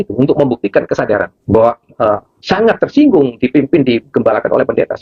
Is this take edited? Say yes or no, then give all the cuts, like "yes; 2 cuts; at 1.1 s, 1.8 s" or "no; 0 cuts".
no; 0 cuts